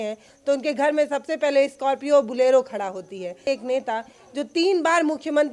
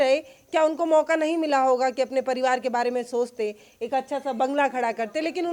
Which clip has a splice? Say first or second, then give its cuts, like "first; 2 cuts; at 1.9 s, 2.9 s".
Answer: first; 1 cut; at 3.5 s